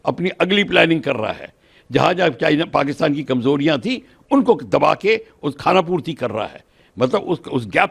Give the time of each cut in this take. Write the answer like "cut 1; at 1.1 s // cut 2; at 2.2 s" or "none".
none

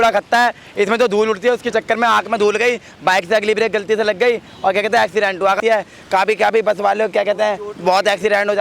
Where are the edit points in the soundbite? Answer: cut 1; at 5.6 s

